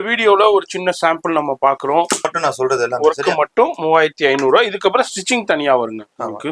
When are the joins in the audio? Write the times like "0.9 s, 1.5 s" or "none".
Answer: 2.3 s

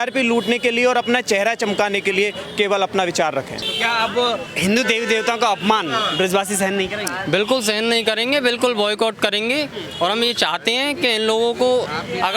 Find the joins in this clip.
3.6 s

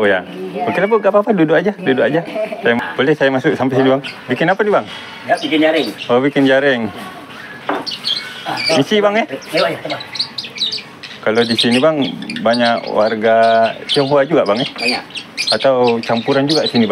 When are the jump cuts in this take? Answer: 2.8 s

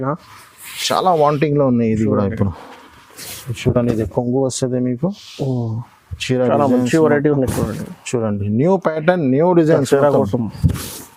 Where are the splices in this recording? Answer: none

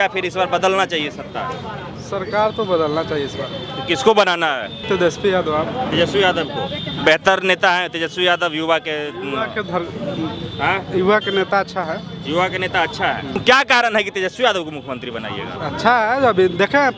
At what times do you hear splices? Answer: 4.9 s, 13.4 s

